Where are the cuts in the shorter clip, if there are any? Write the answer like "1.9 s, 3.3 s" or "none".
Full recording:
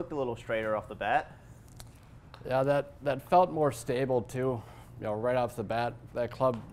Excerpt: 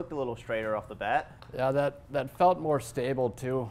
1.4 s

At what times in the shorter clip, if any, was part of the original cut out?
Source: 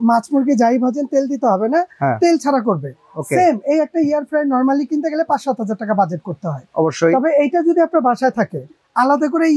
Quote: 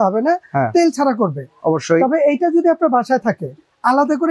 1.5 s

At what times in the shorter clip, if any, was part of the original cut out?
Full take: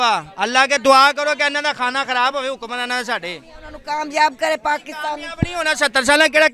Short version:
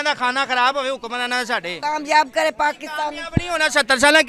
1.8 s

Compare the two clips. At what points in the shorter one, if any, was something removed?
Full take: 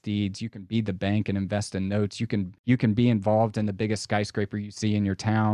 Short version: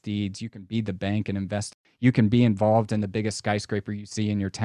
1.8 s

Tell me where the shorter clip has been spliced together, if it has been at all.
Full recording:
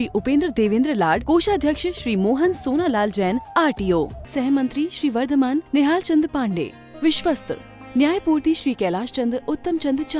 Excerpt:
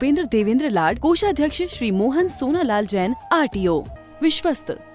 4.0 s

